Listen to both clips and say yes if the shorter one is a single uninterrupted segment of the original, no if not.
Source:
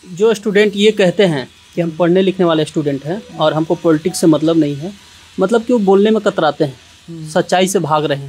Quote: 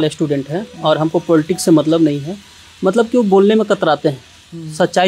yes